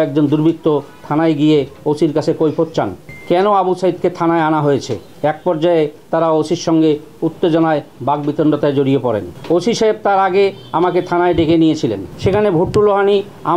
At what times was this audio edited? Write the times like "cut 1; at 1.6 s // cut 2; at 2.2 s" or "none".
none